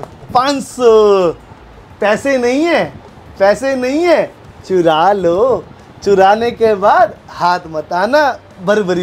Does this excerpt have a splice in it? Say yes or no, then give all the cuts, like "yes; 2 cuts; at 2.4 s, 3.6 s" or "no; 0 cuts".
no; 0 cuts